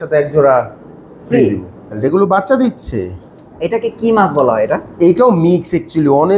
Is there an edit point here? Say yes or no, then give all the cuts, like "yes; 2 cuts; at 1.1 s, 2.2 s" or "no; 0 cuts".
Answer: yes; 1 cut; at 2.0 s